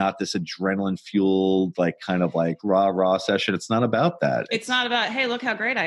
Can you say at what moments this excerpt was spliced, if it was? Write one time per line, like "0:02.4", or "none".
none